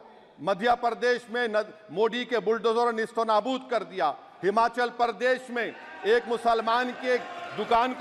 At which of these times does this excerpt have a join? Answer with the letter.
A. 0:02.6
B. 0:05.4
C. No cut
C